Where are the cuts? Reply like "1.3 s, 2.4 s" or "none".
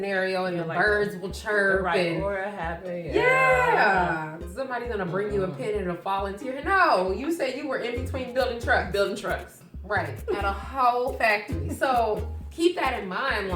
none

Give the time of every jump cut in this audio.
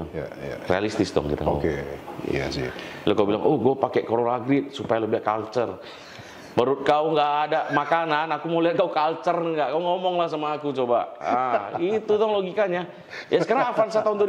none

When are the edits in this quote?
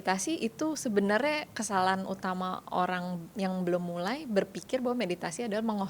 3.2 s

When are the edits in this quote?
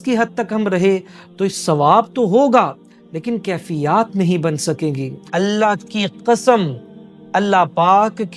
5.1 s

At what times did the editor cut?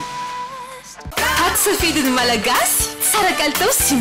0.9 s

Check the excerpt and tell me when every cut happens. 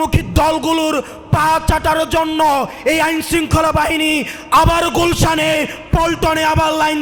none

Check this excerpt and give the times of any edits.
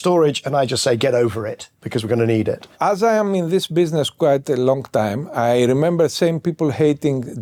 none

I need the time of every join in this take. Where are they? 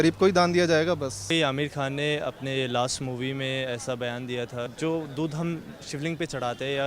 1.3 s, 4.7 s

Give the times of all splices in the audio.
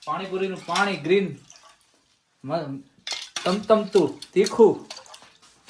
none

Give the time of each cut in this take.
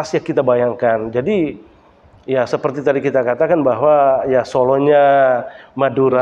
none

